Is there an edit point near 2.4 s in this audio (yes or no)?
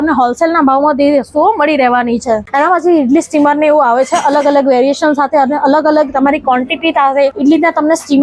yes